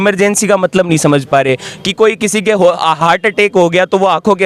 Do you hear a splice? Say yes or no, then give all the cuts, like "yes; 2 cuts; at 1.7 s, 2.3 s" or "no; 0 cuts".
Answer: no; 0 cuts